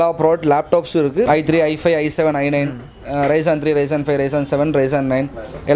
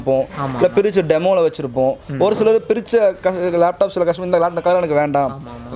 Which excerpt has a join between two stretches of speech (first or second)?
first